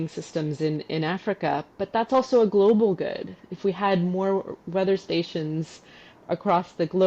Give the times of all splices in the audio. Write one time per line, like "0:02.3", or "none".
none